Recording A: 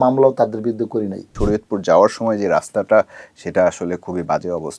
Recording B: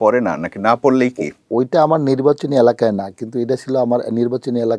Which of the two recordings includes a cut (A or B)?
A